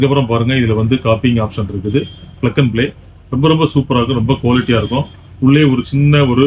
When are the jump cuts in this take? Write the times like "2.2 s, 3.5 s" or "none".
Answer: none